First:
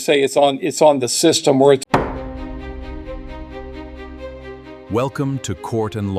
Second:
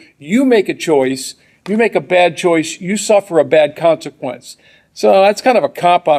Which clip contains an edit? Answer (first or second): first